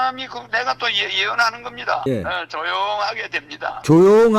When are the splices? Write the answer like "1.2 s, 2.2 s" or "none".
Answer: 2.1 s